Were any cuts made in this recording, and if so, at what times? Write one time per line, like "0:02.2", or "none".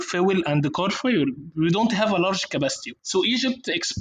0:02.9